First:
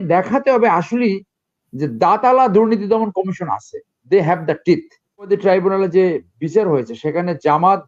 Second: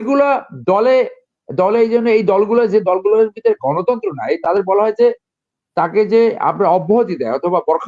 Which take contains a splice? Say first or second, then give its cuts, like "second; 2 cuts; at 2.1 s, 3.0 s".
first; 1 cut; at 5.3 s